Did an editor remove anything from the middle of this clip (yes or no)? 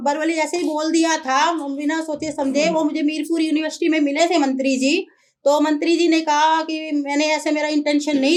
no